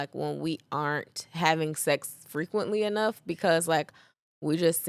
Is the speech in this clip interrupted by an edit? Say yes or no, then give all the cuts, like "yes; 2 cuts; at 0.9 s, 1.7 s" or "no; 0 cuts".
no; 0 cuts